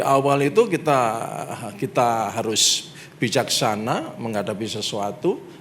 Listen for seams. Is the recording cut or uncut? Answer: uncut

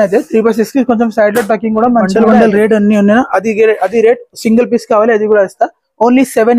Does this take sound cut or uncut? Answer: cut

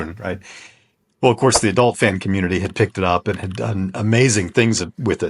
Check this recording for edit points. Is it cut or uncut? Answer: uncut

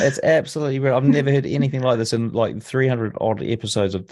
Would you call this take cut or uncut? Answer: uncut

